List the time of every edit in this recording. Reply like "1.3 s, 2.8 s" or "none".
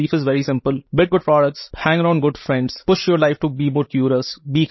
0.8 s, 1.7 s, 2.8 s